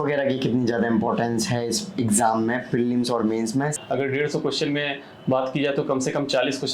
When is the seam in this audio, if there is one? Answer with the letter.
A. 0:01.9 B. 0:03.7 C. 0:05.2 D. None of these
B